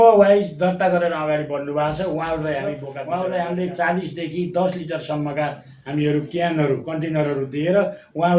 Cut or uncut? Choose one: cut